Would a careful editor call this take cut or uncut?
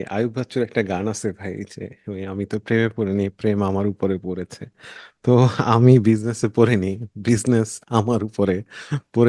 uncut